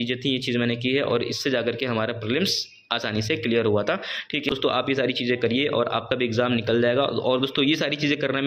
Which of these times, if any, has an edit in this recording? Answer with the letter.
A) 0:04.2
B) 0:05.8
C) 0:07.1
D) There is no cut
D